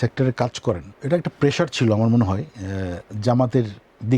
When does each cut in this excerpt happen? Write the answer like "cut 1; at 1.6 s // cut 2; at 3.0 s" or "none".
cut 1; at 0.9 s